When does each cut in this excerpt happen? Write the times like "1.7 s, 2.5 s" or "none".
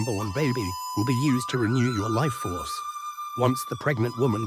none